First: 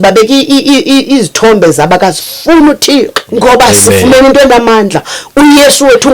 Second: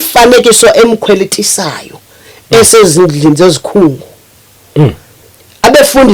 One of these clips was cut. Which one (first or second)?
first